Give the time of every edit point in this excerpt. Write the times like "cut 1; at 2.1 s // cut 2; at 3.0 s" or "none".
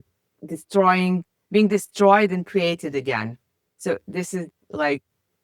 none